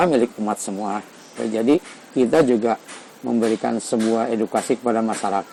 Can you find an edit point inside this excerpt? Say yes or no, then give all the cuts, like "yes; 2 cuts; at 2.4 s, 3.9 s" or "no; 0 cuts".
no; 0 cuts